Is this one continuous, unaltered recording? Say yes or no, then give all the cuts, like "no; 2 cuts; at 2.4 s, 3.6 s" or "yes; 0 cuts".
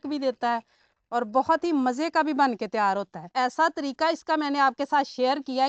no; 1 cut; at 3.2 s